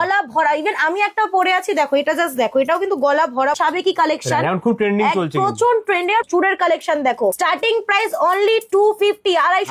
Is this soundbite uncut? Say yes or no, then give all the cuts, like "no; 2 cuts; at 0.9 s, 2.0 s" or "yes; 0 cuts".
no; 3 cuts; at 3.6 s, 6.3 s, 7.4 s